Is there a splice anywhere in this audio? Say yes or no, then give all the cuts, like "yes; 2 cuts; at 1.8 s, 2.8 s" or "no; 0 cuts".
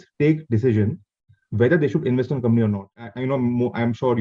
yes; 1 cut; at 3.1 s